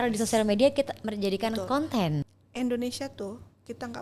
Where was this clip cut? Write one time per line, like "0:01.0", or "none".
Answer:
0:02.2